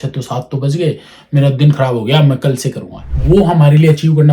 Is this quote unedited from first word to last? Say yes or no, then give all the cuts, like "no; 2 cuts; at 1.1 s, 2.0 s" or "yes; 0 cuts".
no; 1 cut; at 3.1 s